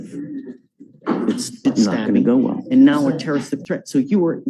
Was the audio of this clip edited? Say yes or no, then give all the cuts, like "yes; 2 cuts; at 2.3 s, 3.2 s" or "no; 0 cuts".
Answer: yes; 1 cut; at 2.6 s